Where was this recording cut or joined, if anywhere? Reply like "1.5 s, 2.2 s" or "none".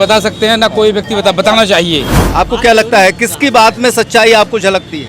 2.2 s